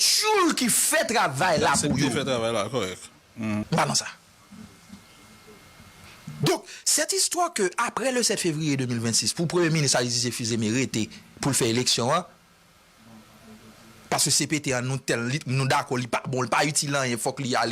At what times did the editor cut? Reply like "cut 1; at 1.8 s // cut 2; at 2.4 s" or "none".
cut 1; at 3.6 s

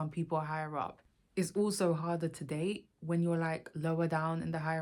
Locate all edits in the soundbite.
cut 1; at 1.3 s

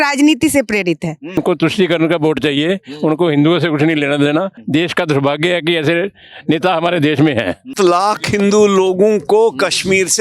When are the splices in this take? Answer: cut 1; at 1.4 s // cut 2; at 4.6 s // cut 3; at 7.7 s

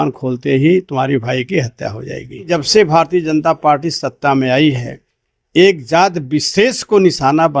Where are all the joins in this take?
cut 1; at 2.5 s

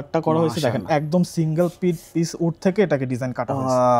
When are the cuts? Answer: none

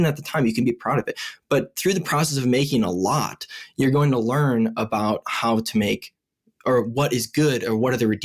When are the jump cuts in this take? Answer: none

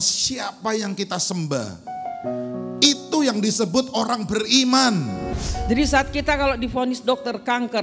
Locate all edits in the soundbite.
cut 1; at 5.3 s

